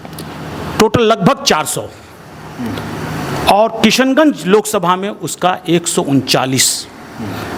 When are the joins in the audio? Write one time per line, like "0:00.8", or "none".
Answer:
none